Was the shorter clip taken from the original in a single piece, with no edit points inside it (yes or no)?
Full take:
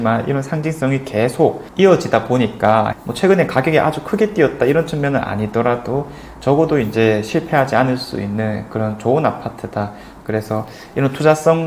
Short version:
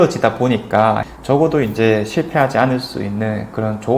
no